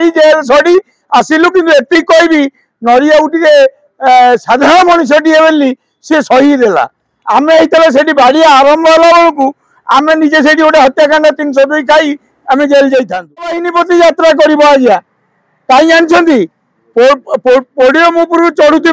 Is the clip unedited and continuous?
no; 1 cut; at 13.6 s

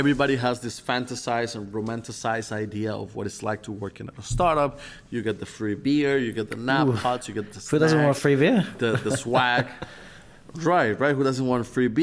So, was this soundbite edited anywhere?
no; 0 cuts

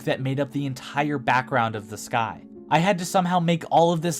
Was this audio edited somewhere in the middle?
no; 0 cuts

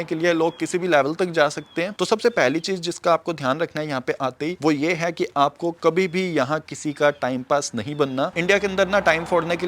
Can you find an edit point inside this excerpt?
no; 0 cuts

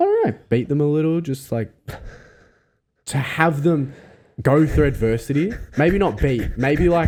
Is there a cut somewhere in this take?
no; 0 cuts

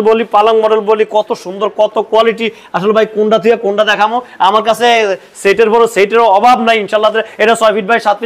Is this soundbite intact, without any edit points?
yes; 0 cuts

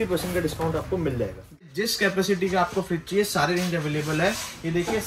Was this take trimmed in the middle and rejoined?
yes; 1 cut; at 1.6 s

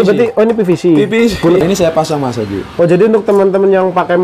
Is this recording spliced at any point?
yes; 1 cut; at 1.6 s

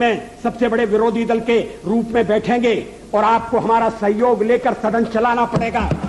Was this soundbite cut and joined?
no; 0 cuts

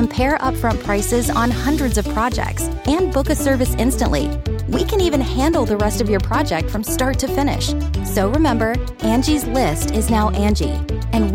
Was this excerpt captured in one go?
yes; 0 cuts

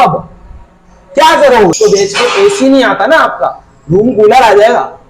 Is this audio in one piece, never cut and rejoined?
no; 1 cut; at 1.7 s

